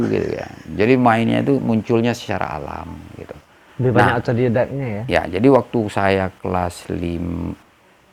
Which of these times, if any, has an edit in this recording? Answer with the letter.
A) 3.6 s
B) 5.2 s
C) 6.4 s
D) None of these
D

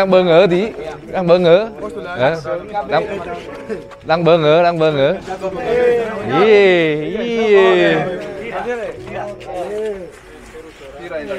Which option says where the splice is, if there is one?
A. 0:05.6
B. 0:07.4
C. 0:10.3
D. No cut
A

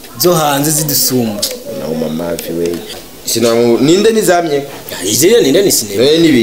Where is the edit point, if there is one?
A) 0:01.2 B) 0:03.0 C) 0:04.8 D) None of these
B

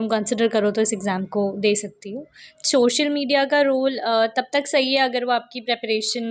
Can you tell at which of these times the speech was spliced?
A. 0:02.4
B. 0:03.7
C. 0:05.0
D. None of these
A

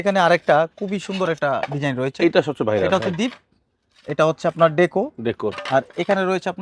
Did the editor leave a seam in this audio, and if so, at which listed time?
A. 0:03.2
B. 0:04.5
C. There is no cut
C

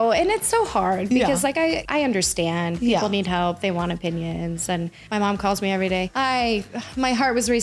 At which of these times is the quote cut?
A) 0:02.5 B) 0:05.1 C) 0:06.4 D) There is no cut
B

